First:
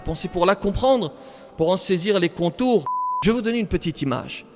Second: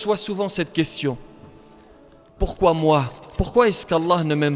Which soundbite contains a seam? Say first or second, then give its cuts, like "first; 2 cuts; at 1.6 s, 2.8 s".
first; 1 cut; at 3.0 s